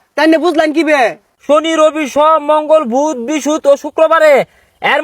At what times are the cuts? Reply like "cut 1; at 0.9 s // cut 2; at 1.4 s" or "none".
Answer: cut 1; at 1.3 s

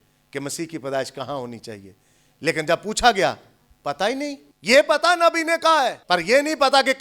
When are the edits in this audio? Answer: cut 1; at 4.5 s // cut 2; at 6.0 s

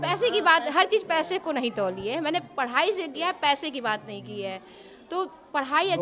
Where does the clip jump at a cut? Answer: none

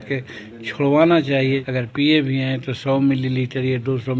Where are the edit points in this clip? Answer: cut 1; at 1.6 s

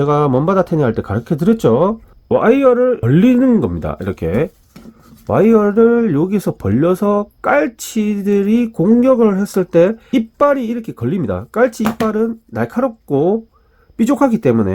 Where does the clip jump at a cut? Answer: cut 1; at 2.1 s // cut 2; at 3.0 s // cut 3; at 10.0 s

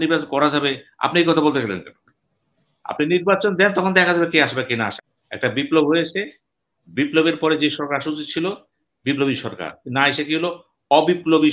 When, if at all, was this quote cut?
cut 1; at 4.9 s

